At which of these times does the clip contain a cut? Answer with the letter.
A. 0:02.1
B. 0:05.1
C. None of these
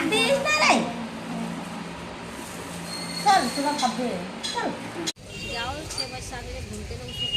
B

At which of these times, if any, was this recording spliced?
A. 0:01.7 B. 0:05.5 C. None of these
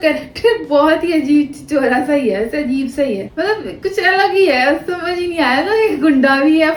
C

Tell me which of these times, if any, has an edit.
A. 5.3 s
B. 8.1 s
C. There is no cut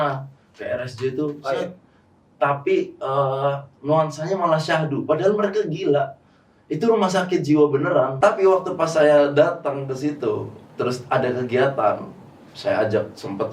B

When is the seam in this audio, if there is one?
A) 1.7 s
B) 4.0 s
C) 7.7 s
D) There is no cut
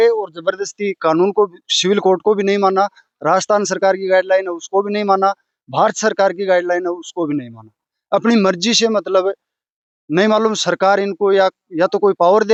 D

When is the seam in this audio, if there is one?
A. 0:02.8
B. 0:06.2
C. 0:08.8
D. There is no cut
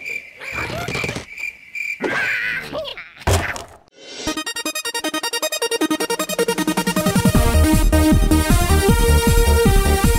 B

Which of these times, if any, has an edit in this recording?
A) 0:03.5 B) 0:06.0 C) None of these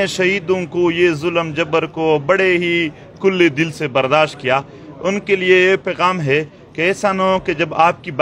C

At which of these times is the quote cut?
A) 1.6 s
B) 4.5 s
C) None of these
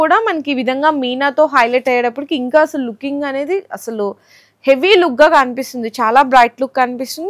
C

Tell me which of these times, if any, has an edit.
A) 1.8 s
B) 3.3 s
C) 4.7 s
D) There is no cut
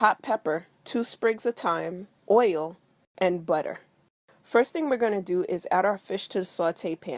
A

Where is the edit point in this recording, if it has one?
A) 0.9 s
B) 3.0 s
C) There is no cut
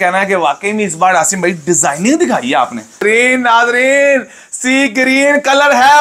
B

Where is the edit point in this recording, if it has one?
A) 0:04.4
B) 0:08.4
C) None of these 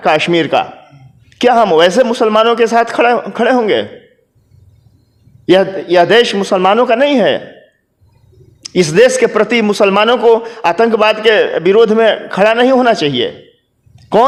C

